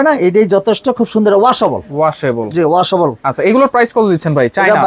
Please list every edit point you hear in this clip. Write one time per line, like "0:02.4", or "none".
none